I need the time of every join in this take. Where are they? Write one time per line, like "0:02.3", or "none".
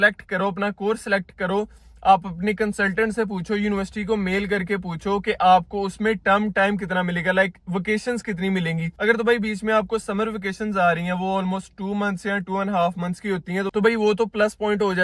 none